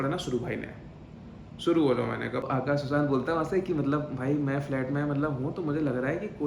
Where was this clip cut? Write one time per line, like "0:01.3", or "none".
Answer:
0:02.4